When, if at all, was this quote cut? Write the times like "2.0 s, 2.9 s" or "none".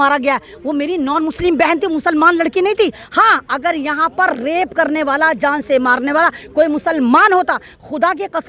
none